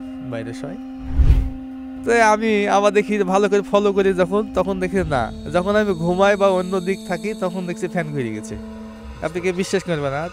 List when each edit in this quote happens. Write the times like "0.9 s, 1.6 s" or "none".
1.2 s